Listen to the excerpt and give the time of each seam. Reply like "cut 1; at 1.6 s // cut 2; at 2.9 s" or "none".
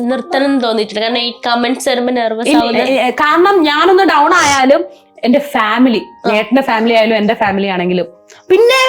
cut 1; at 2.6 s